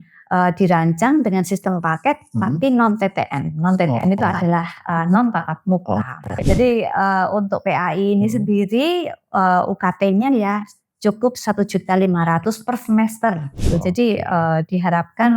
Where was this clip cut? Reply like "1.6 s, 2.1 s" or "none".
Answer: 6.4 s, 13.6 s